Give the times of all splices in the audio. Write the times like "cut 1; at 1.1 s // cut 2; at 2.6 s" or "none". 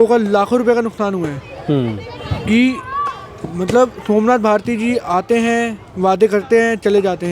none